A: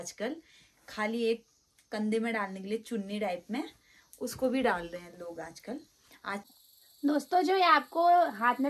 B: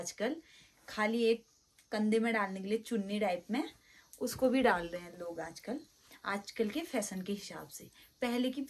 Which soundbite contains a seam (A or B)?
A